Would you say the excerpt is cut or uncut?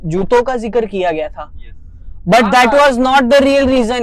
uncut